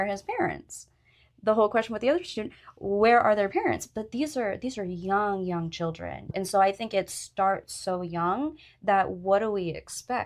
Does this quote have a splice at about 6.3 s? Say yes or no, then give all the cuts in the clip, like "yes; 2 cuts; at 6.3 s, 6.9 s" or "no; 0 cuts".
yes; 1 cut; at 6.3 s